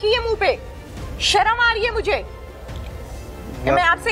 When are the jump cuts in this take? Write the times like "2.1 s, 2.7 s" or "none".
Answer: none